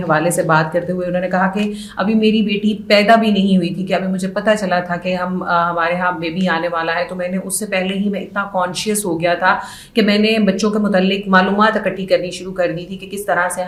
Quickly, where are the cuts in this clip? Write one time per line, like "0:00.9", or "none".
none